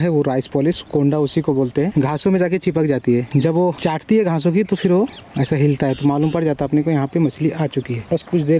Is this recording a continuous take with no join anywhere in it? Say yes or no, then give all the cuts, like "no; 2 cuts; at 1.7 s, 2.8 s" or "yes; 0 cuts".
yes; 0 cuts